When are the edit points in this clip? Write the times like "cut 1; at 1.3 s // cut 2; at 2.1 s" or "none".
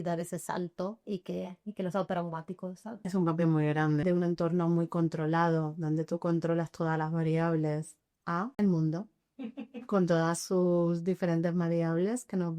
cut 1; at 3.0 s // cut 2; at 4.0 s // cut 3; at 8.5 s